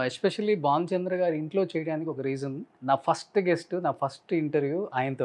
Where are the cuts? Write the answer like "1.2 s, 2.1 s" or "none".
2.7 s